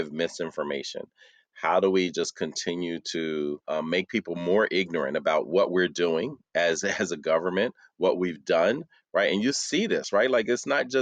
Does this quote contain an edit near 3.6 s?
yes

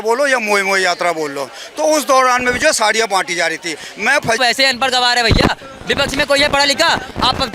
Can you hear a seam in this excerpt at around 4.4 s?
yes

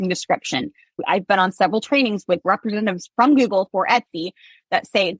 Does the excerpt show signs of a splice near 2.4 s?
yes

